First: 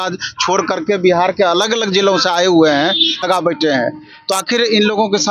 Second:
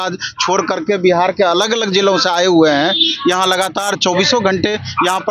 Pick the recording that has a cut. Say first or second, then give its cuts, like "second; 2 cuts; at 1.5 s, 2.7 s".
first; 1 cut; at 3.2 s